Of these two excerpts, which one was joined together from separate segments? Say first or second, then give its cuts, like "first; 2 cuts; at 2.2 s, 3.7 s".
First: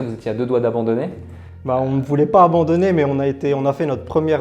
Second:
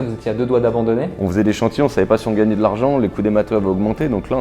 second; 1 cut; at 1.2 s